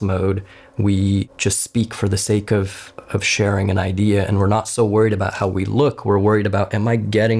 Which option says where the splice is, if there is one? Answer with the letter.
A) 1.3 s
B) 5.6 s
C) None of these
A